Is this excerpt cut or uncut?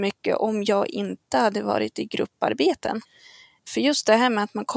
cut